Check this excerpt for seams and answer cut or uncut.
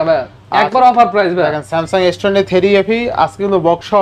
uncut